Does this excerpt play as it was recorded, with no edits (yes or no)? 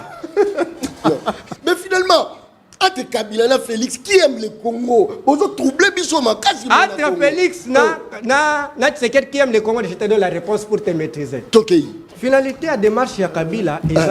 no